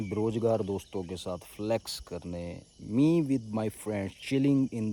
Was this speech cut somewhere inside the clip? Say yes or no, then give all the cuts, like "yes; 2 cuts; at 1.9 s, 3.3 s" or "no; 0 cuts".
no; 0 cuts